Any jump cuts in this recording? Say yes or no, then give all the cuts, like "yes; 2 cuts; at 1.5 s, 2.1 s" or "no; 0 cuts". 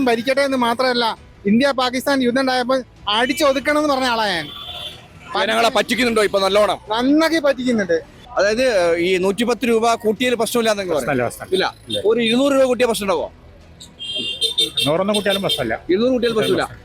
yes; 1 cut; at 8.2 s